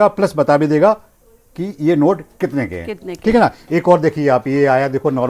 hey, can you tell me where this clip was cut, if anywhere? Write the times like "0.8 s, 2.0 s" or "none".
3.6 s

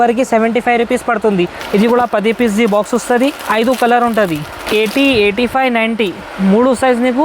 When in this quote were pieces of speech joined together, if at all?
1.6 s, 4.5 s

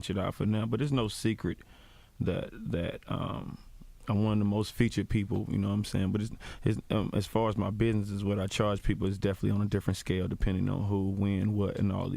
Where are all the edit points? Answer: 5.3 s

